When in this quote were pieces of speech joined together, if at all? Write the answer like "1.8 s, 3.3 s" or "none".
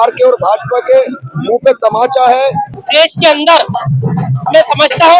2.8 s